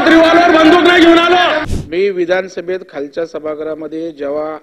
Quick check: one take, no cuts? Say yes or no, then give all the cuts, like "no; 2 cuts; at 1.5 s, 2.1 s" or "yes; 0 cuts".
no; 1 cut; at 1.7 s